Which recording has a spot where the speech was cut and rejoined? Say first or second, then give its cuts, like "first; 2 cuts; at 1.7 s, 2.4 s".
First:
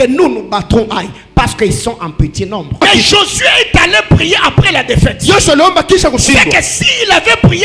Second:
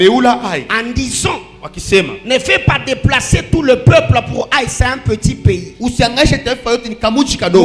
first; 1 cut; at 2.8 s